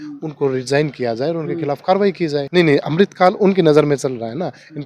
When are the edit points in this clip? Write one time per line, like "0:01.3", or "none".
0:02.4

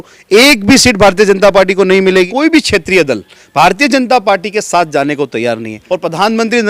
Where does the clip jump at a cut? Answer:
0:02.3
0:05.8

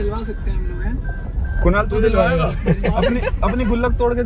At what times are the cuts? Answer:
none

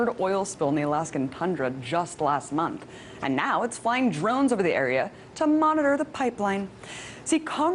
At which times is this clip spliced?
0:02.0

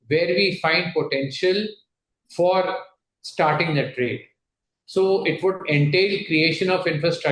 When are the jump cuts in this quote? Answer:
none

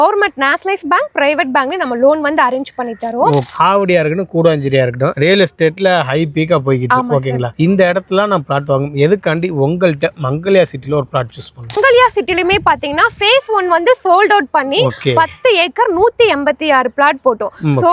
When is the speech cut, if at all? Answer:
0:03.5
0:11.7

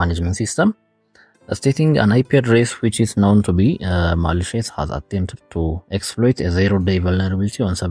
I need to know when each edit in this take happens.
0:05.8

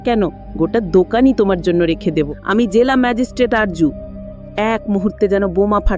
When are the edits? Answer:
0:02.4

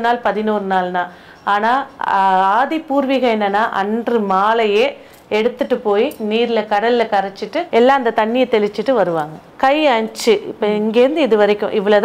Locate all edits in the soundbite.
0:07.6
0:09.4

